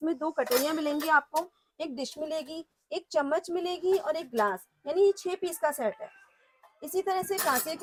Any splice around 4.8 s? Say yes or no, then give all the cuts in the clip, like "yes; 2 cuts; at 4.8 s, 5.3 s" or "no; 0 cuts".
no; 0 cuts